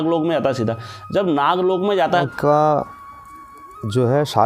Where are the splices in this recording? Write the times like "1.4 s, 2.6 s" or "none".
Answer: 2.2 s